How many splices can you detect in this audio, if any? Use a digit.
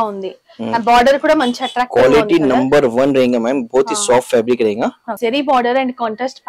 1